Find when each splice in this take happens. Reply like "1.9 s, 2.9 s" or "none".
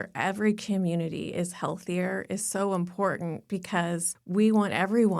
4.1 s

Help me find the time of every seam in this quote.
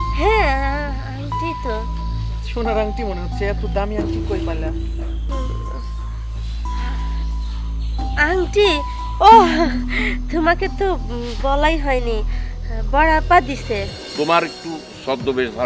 14.0 s

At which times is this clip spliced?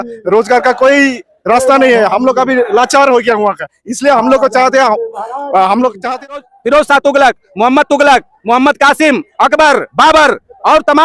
6.4 s

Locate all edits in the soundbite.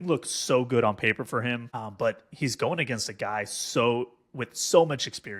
1.9 s

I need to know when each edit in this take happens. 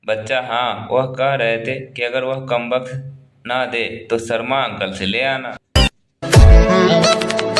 none

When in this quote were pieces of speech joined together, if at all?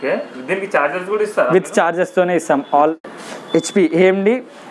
3.0 s

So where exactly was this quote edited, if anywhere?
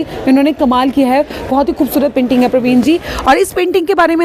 none

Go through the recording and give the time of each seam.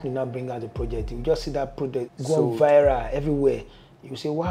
2.1 s

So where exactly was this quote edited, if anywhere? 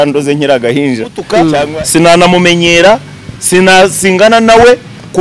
1.7 s

